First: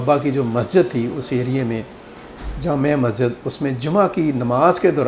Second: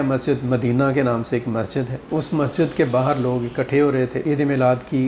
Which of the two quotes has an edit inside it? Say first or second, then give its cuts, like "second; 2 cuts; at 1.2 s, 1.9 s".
second; 2 cuts; at 2.0 s, 4.2 s